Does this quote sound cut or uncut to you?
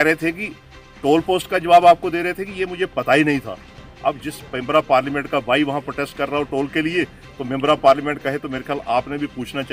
uncut